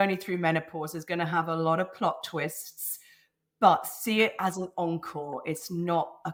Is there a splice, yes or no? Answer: no